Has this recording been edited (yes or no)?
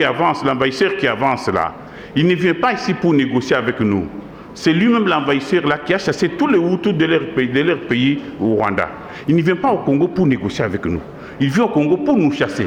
no